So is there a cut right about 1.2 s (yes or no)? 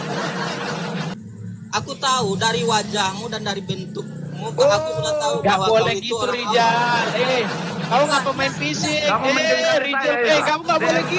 yes